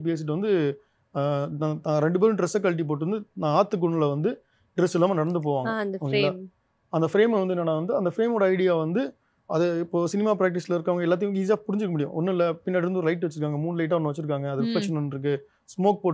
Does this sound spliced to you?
no; 0 cuts

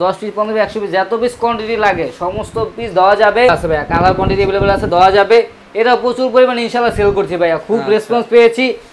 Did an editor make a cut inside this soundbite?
yes; 1 cut; at 3.5 s

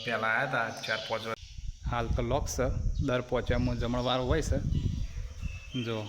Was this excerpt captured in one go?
no; 1 cut; at 1.4 s

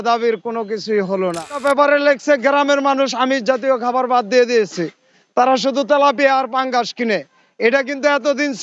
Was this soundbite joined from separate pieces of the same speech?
yes; 1 cut; at 1.6 s

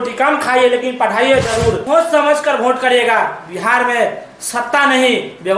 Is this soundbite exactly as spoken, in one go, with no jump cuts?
no; 1 cut; at 1.8 s

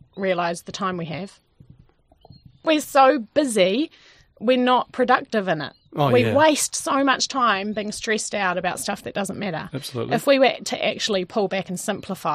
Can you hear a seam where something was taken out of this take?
yes; 1 cut; at 2.6 s

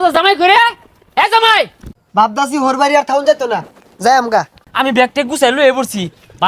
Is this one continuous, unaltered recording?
no; 2 cuts; at 1.9 s, 4.6 s

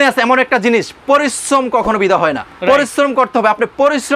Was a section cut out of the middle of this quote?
yes; 1 cut; at 2.5 s

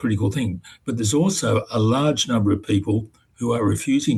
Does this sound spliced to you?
no; 0 cuts

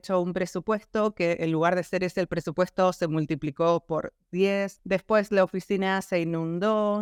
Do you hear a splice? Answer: no; 0 cuts

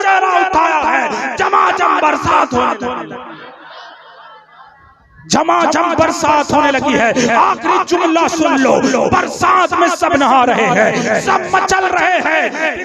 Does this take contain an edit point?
no; 0 cuts

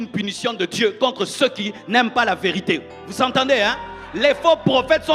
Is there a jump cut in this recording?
no; 0 cuts

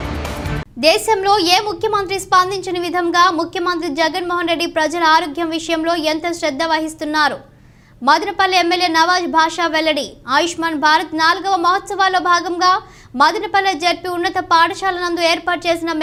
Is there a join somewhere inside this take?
no; 0 cuts

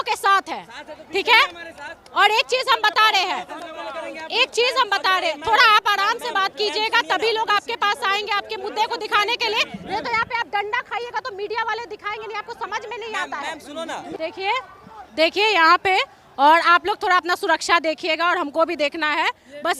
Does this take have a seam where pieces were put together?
yes; 1 cut; at 14.2 s

